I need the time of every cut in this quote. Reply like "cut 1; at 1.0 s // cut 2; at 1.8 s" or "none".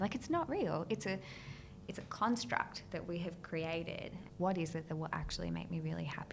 cut 1; at 4.2 s